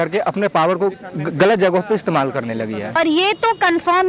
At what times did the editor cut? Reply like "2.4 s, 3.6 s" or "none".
3.0 s